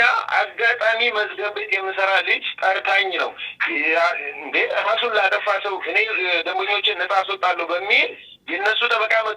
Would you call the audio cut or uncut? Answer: uncut